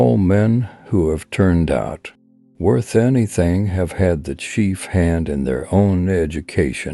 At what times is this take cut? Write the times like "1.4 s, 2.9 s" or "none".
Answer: none